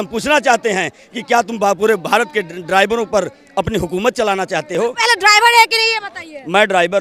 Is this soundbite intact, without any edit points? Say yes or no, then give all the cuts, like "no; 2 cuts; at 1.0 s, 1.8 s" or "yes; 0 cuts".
yes; 0 cuts